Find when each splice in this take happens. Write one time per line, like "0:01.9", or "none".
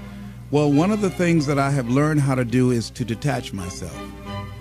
0:01.3